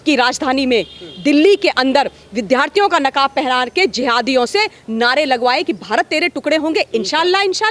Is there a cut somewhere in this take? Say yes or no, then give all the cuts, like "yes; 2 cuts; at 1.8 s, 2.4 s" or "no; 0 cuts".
no; 0 cuts